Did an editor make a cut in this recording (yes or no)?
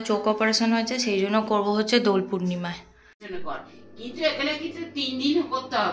yes